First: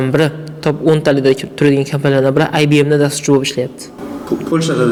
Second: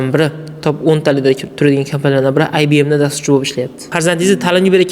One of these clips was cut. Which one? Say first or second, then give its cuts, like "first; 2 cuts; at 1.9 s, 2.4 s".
second; 1 cut; at 3.9 s